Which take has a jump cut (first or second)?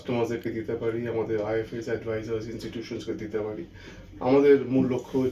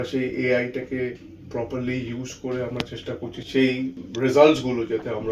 second